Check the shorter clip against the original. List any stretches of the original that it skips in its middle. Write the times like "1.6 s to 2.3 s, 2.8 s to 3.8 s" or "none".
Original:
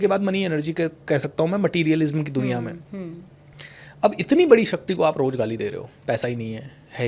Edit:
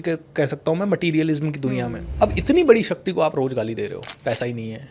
2.7 s to 3.8 s